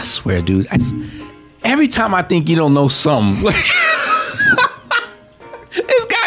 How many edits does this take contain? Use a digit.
1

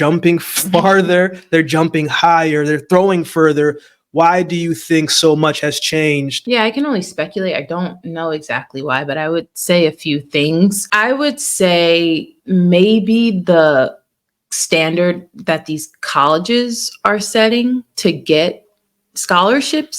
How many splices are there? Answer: 2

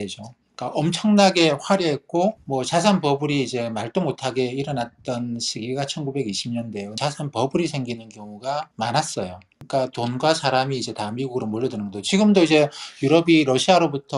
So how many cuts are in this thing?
4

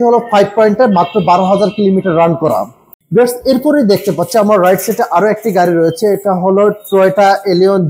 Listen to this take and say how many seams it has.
1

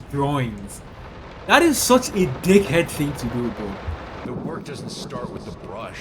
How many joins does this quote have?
1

